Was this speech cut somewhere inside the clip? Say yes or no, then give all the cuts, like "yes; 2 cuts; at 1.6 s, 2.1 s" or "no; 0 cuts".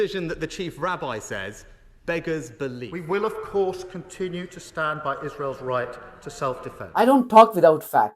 yes; 2 cuts; at 2.9 s, 6.8 s